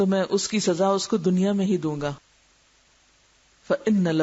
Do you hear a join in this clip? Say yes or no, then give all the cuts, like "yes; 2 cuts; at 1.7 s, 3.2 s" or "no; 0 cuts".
yes; 1 cut; at 2.9 s